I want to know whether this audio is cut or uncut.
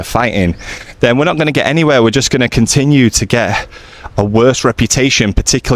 uncut